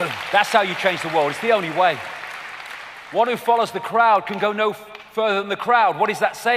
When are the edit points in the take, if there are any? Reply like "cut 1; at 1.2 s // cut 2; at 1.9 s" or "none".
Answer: none